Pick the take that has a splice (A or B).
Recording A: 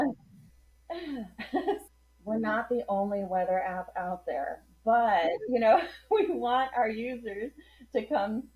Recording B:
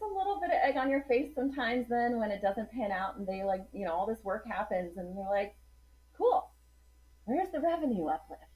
A